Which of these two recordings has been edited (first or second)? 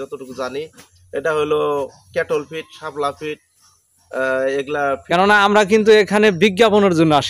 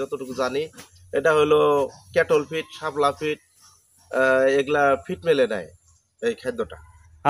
first